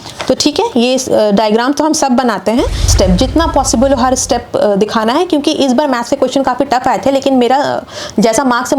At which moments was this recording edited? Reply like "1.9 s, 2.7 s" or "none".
2.9 s